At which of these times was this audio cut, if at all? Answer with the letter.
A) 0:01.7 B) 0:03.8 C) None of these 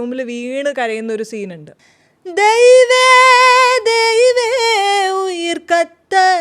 A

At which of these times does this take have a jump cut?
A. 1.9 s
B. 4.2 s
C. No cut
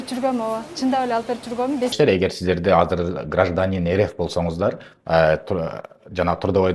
A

